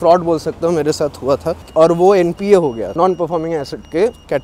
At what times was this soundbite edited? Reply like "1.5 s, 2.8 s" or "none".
1.6 s